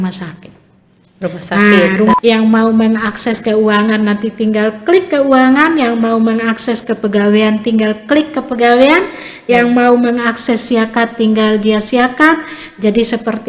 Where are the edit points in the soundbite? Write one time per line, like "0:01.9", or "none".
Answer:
0:02.1